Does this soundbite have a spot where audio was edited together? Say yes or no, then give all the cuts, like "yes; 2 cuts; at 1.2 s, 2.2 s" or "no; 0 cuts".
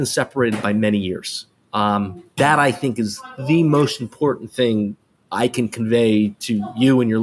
no; 0 cuts